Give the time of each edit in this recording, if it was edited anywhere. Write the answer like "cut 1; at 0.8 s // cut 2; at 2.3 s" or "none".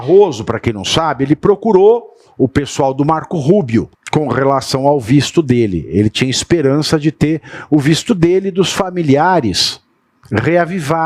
cut 1; at 4.0 s